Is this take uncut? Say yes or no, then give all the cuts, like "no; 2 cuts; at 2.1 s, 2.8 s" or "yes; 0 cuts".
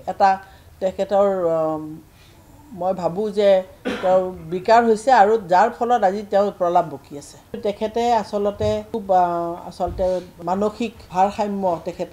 no; 3 cuts; at 7.6 s, 8.9 s, 10.7 s